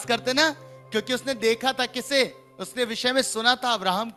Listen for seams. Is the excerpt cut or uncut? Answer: uncut